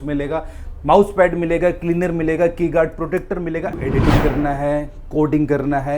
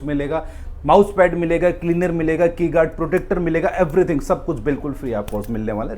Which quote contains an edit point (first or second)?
first